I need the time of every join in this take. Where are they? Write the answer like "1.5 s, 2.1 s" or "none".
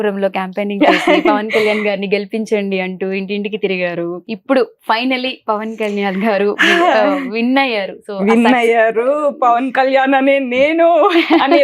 4.2 s